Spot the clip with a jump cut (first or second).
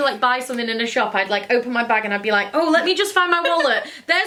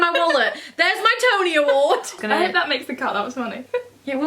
second